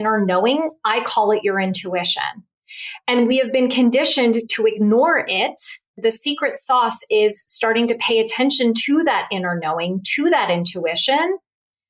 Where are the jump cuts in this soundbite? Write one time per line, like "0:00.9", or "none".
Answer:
0:06.0

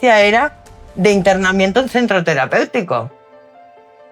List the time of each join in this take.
none

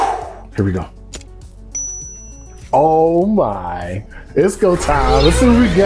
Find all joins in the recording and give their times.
none

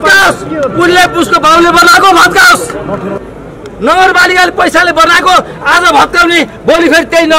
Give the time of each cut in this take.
0:03.2

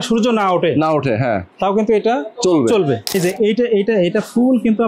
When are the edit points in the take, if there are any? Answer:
0:03.2

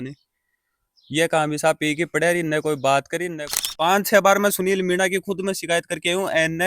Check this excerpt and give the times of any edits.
0:03.3

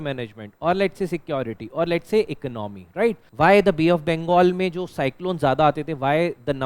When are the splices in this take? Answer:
0:03.2

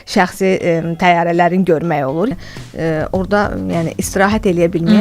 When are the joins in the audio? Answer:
0:02.3

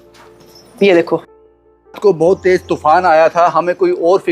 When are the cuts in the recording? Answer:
0:01.4

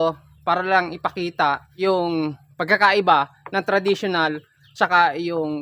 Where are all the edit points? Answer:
0:01.7

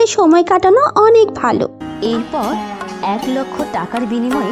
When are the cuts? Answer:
0:01.9

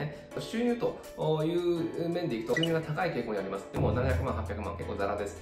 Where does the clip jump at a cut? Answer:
0:02.5

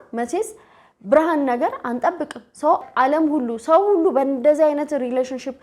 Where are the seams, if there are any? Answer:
0:02.8

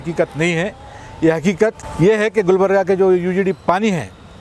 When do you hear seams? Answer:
0:01.8

